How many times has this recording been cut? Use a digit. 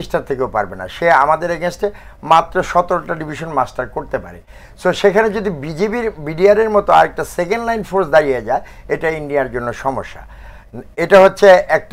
0